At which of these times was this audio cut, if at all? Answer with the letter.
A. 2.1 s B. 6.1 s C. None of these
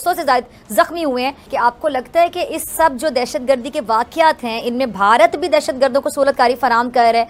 C